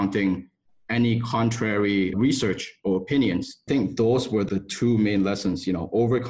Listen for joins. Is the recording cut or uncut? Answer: cut